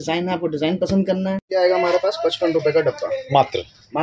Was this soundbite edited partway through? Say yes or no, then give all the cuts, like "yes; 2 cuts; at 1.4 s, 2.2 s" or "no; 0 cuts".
yes; 1 cut; at 1.4 s